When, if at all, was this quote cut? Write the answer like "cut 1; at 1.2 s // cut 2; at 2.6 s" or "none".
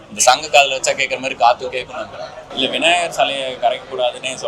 cut 1; at 2.5 s